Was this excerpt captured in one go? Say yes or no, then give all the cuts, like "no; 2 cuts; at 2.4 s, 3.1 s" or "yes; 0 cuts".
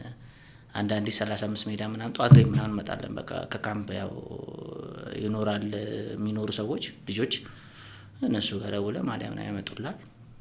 yes; 0 cuts